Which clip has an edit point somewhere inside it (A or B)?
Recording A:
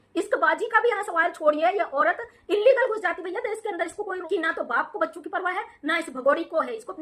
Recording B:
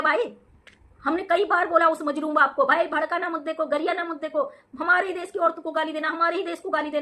A